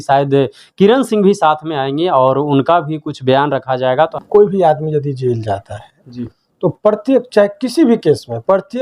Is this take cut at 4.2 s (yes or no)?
yes